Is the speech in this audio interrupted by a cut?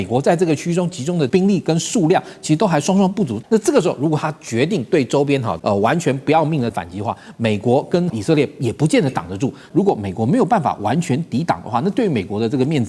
yes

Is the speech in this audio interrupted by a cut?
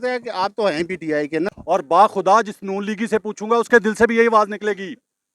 yes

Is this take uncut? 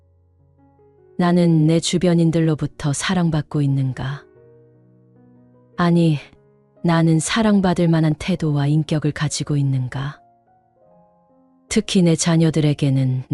yes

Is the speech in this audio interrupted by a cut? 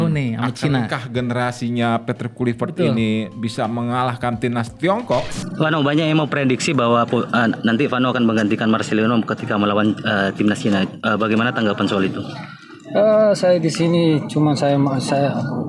yes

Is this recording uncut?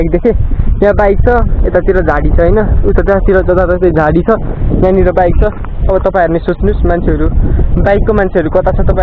yes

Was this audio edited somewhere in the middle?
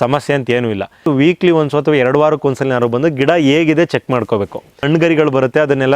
yes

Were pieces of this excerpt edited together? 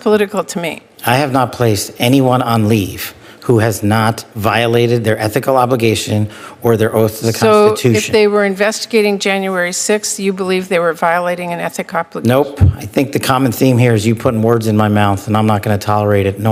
no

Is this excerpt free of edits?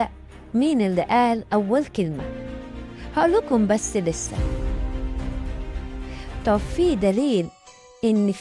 yes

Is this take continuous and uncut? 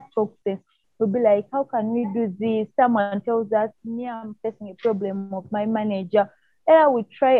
yes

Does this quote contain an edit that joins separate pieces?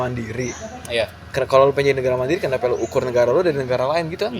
no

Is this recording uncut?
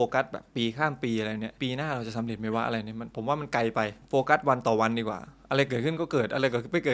no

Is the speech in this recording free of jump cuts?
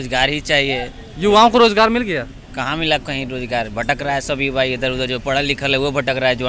yes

